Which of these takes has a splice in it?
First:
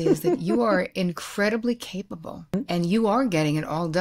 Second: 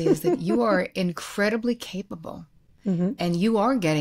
first; 1 cut; at 2.5 s

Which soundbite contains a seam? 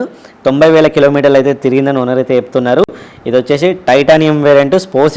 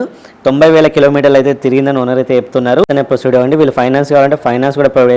second; 1 cut; at 2.9 s

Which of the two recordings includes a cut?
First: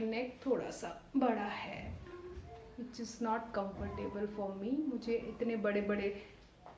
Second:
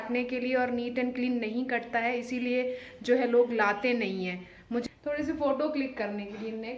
second; 1 cut; at 4.8 s

